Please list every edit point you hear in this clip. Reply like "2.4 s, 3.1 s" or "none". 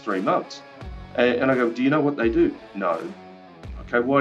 none

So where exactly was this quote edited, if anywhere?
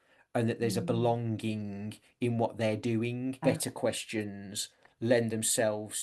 3.4 s

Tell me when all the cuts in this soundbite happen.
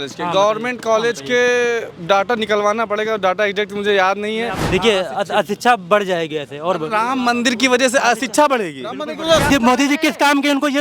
4.6 s, 9.4 s

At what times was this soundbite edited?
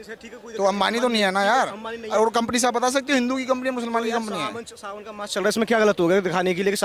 none

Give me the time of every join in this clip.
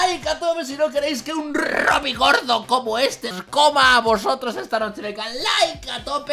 3.4 s

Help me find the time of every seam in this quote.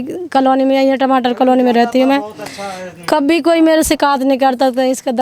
none

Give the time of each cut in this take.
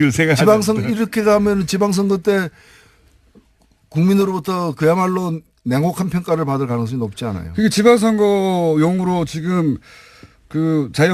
none

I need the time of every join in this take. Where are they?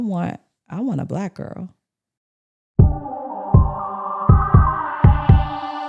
2.6 s

